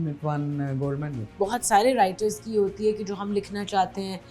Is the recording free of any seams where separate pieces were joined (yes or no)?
no